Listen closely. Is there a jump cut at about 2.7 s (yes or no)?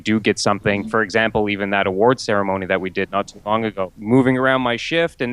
no